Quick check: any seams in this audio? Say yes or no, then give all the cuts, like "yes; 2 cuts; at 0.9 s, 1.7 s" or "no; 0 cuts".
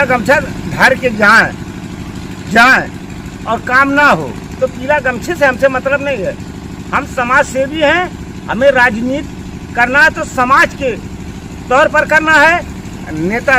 no; 0 cuts